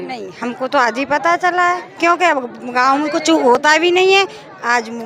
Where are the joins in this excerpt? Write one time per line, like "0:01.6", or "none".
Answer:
none